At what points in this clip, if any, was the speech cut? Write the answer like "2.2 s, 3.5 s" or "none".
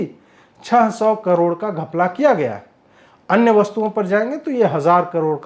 none